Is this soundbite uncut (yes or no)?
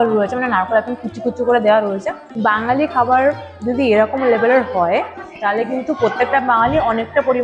no